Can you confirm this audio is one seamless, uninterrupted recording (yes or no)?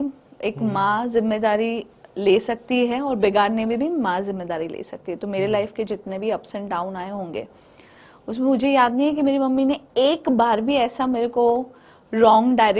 yes